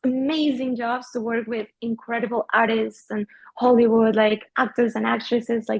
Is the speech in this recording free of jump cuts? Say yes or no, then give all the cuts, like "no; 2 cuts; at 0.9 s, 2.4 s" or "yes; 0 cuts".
yes; 0 cuts